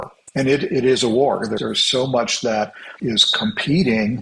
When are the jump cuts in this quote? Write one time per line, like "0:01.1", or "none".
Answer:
0:01.6
0:02.8